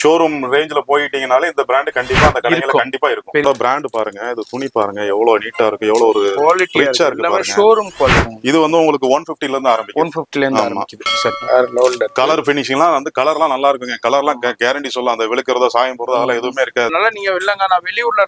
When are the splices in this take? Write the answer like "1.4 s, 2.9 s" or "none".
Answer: 3.4 s, 8.3 s, 11.4 s, 16.9 s